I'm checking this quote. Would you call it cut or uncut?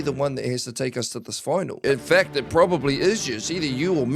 cut